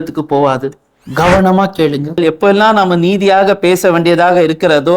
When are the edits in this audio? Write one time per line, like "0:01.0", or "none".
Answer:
0:02.2